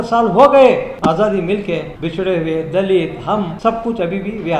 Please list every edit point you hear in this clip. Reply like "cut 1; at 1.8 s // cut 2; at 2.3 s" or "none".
cut 1; at 0.9 s // cut 2; at 2.0 s // cut 3; at 3.5 s